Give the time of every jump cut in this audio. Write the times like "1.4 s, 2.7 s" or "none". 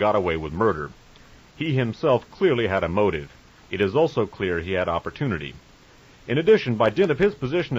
3.9 s